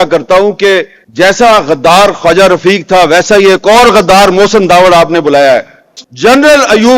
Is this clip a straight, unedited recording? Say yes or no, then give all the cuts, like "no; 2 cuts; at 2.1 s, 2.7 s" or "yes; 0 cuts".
no; 1 cut; at 6.0 s